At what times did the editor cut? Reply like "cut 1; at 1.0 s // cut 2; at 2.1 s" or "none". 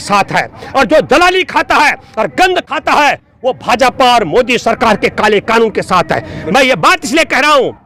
none